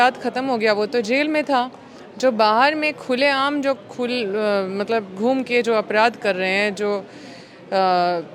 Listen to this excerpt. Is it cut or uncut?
uncut